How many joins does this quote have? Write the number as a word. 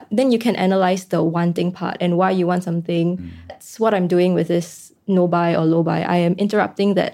one